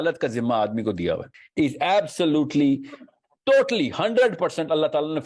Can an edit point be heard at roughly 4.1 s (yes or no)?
no